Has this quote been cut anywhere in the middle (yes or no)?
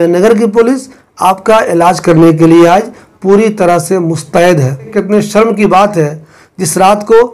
yes